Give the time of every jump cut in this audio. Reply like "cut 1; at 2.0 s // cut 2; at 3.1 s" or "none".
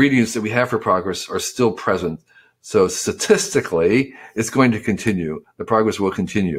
none